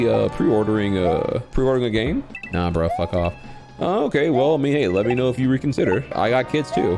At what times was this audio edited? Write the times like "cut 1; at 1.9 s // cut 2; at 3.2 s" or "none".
cut 1; at 1.5 s // cut 2; at 6.1 s